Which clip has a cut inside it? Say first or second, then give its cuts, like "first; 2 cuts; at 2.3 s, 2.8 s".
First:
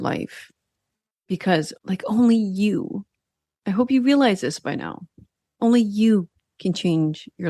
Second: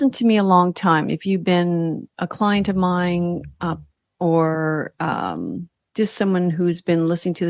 first; 1 cut; at 1.7 s